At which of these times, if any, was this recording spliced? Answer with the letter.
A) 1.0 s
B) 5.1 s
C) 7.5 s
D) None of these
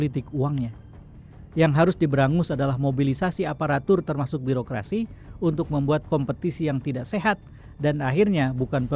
D